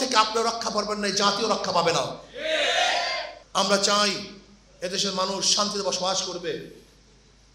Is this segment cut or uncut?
cut